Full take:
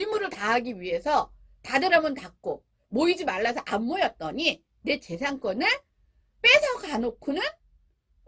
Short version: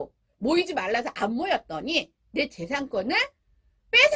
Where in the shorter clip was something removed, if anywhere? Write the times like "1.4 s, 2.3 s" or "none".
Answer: none

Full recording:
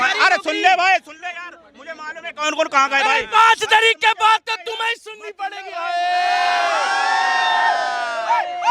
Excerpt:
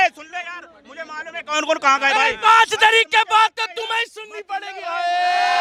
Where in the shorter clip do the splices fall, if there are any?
none

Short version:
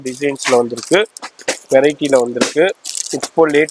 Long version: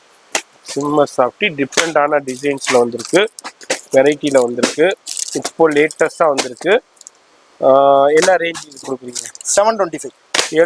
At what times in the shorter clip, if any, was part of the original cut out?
none

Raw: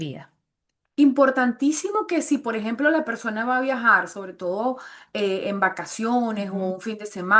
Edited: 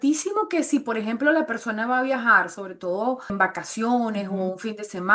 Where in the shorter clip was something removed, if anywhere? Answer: 3.3 s

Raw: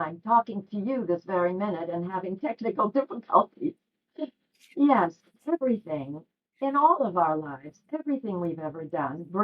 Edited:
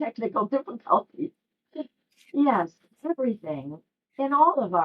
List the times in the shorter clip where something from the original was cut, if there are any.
none

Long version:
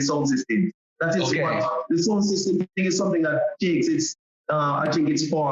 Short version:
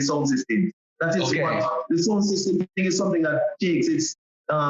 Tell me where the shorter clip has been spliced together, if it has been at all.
none

